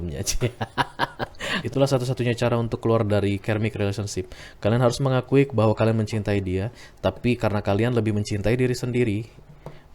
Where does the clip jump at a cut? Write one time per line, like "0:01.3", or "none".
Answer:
0:01.5